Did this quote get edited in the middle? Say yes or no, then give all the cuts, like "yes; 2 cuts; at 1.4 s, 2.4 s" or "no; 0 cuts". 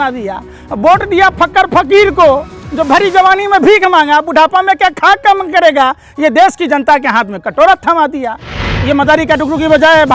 yes; 1 cut; at 8.6 s